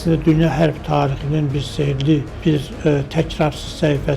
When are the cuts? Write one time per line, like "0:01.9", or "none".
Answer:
0:02.3